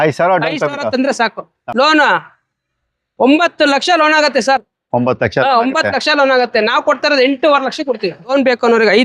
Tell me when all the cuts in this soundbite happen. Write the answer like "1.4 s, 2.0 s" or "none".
1.5 s, 8.3 s